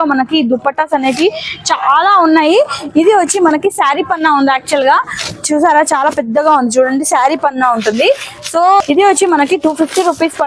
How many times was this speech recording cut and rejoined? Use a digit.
1